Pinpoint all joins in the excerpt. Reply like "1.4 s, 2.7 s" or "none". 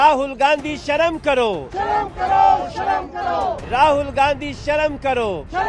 none